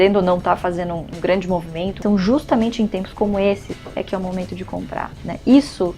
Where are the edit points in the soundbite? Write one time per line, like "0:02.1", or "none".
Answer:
0:01.1
0:02.0
0:03.7